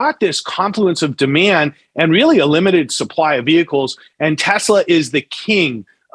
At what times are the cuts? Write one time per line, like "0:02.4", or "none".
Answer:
none